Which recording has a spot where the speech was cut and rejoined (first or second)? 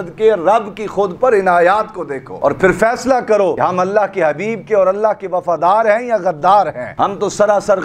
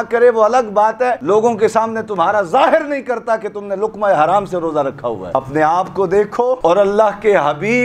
second